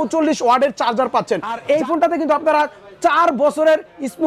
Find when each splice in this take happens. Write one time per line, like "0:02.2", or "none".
0:01.6